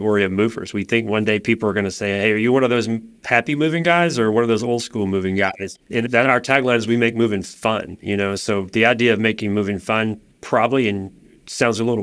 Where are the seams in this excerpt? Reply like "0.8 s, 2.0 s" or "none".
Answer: 5.5 s